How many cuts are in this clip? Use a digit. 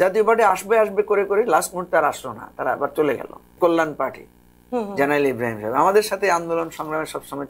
1